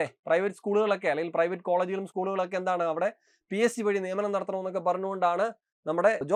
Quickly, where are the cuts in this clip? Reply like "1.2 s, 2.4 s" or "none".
none